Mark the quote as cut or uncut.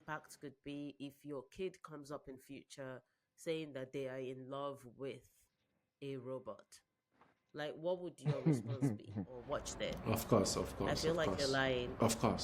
cut